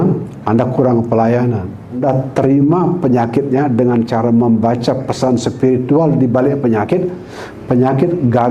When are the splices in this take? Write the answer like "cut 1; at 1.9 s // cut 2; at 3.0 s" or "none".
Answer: cut 1; at 2.0 s